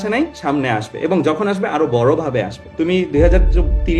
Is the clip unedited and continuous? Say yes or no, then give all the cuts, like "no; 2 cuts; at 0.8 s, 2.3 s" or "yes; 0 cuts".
no; 1 cut; at 2.6 s